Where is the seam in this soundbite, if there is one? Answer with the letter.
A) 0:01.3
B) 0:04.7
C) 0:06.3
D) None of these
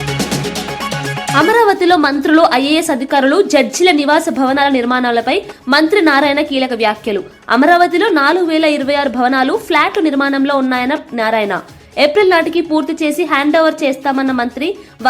A